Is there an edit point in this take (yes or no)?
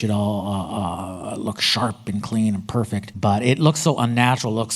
yes